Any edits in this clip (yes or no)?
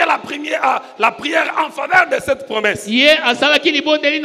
no